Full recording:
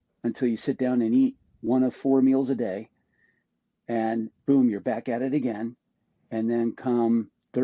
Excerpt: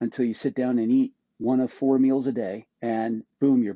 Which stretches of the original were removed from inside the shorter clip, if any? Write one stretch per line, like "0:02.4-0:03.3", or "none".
0:02.9-0:03.7